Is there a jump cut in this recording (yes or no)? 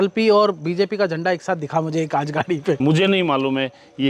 yes